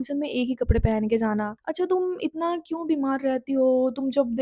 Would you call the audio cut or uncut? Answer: cut